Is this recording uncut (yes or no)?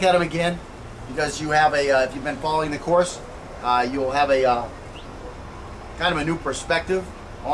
yes